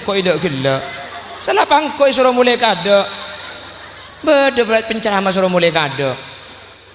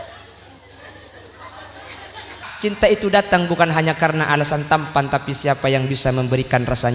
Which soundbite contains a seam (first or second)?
second